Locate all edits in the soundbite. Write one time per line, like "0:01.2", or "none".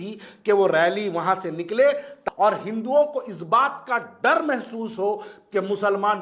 0:02.2